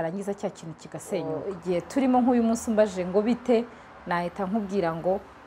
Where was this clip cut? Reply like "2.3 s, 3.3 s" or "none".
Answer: 1.4 s